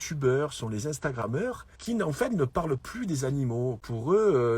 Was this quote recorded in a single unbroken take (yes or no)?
no